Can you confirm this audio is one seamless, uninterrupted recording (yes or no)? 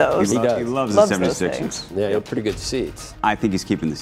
no